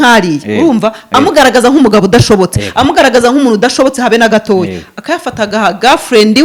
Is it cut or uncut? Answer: uncut